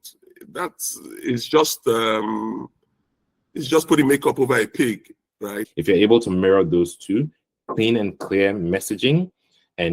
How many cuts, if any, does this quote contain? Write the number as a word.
one